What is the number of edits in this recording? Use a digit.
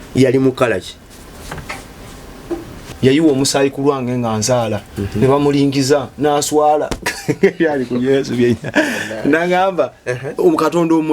1